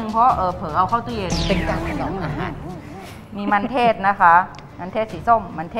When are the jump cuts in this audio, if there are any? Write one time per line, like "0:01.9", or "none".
none